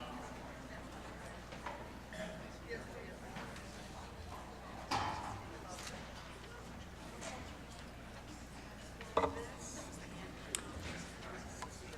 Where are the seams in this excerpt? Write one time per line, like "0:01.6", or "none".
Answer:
0:07.7